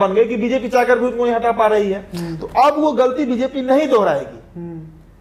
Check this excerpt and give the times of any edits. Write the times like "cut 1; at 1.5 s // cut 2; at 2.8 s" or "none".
none